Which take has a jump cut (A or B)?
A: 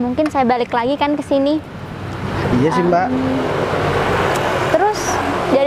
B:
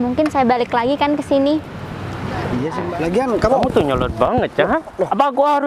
B